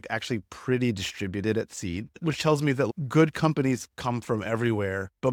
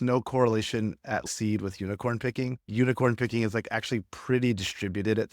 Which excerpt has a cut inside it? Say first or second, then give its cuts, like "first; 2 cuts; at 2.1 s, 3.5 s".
second; 2 cuts; at 1.2 s, 2.7 s